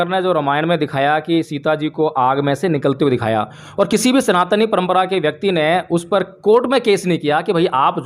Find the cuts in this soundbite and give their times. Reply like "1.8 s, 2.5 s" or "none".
none